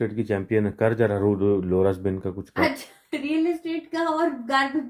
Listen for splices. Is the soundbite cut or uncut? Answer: uncut